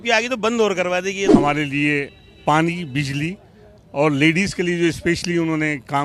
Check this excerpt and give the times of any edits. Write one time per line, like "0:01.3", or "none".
0:01.3